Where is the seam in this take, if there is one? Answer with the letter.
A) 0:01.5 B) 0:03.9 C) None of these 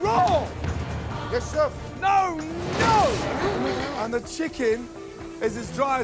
B